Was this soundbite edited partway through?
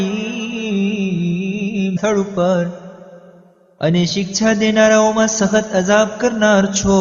no; 0 cuts

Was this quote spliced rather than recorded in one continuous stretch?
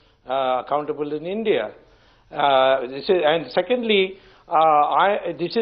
yes; 1 cut; at 4.3 s

